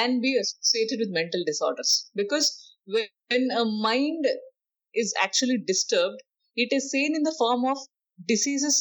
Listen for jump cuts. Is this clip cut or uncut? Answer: uncut